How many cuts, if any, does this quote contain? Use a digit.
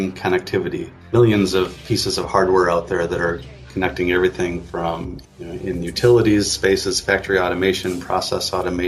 2